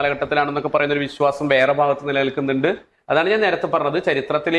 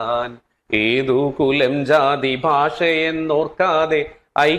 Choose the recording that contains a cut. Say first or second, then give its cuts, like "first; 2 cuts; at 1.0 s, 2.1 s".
first; 1 cut; at 2.9 s